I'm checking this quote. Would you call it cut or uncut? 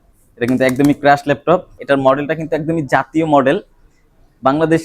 cut